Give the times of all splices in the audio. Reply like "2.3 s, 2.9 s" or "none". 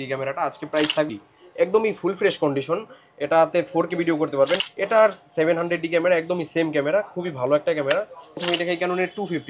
1.1 s, 4.7 s, 8.3 s